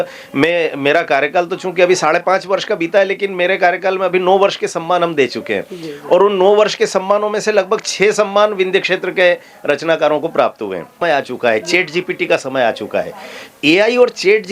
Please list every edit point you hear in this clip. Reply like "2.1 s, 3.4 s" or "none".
10.9 s